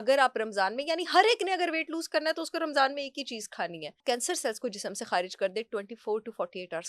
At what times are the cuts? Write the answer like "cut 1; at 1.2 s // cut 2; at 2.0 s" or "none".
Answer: cut 1; at 4.0 s